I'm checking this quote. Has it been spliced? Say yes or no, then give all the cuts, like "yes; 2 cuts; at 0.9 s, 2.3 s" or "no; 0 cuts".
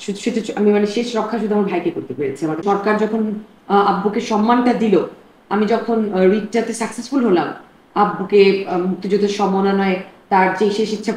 yes; 1 cut; at 2.6 s